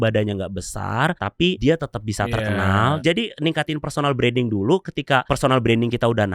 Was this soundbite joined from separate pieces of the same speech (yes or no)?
yes